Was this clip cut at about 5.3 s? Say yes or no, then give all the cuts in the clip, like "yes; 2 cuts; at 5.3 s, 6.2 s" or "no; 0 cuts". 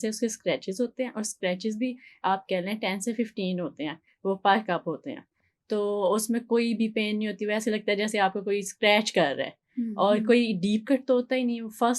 no; 0 cuts